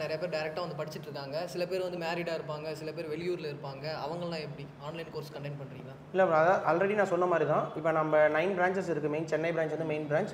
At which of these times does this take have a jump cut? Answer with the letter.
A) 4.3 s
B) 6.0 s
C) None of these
C